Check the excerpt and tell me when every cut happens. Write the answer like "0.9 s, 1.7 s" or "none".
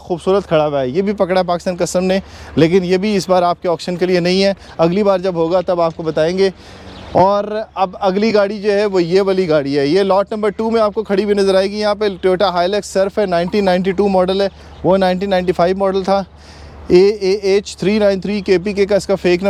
none